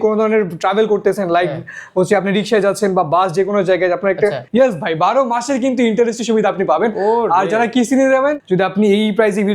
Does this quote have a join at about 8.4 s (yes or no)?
yes